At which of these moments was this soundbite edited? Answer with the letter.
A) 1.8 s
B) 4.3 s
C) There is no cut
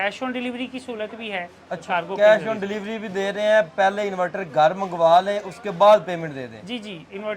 A